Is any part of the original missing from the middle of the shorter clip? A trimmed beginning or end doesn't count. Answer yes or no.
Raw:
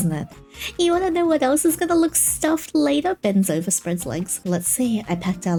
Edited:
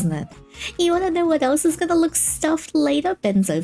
no